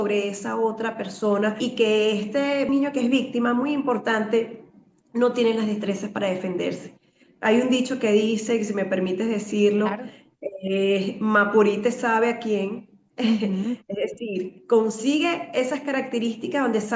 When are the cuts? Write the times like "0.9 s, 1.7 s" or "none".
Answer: 1.6 s, 2.7 s